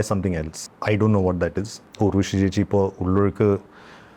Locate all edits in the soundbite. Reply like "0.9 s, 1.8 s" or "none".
1.8 s